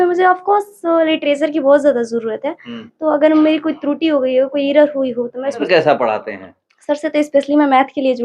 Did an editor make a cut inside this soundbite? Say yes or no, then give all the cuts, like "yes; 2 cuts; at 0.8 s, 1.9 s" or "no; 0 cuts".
yes; 1 cut; at 5.6 s